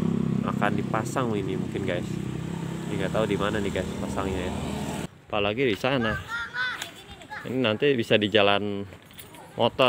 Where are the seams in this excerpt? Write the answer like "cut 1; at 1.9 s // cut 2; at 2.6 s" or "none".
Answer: cut 1; at 5.1 s